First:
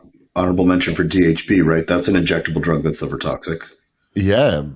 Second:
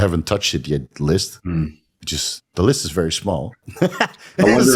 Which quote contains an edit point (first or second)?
first